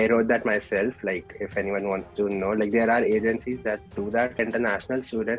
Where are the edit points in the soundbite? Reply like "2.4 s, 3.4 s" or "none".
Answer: 4.4 s